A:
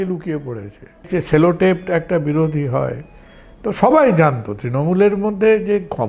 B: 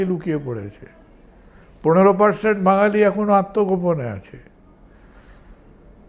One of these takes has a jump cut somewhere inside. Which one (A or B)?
A